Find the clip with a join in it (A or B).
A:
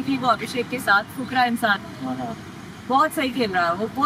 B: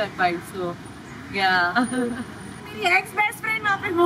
B